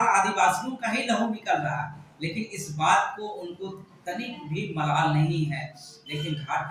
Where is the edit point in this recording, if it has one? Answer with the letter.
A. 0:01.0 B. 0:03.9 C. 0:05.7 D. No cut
D